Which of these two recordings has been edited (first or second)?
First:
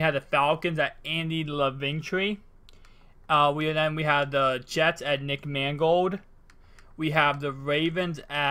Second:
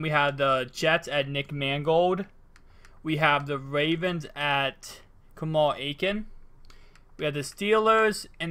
first